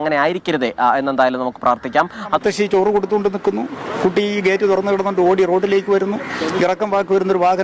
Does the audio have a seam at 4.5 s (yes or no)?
no